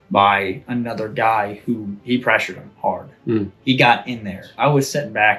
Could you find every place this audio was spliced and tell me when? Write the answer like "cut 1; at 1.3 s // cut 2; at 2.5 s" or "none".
cut 1; at 2.0 s // cut 2; at 4.5 s